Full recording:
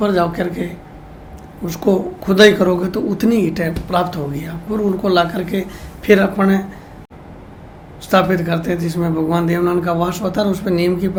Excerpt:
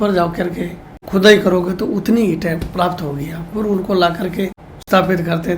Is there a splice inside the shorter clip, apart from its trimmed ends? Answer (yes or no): yes